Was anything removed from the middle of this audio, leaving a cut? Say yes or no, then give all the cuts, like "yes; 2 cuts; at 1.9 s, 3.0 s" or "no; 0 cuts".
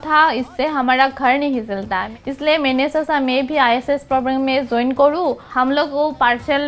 yes; 2 cuts; at 2.1 s, 5.4 s